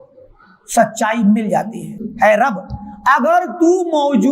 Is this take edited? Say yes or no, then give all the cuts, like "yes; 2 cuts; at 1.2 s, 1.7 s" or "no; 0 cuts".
yes; 1 cut; at 2.0 s